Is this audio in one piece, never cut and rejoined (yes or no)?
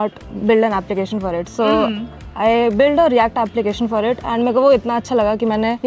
yes